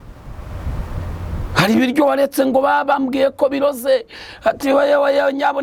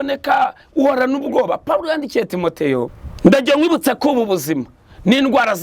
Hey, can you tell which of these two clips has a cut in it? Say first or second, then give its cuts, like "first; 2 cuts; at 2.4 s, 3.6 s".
second; 1 cut; at 3.0 s